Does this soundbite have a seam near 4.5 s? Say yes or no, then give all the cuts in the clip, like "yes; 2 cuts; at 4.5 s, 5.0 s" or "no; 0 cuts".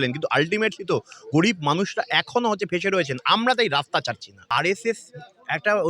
yes; 1 cut; at 4.5 s